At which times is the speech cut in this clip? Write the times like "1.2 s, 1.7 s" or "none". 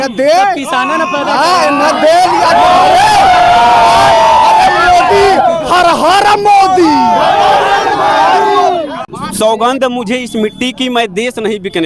9.0 s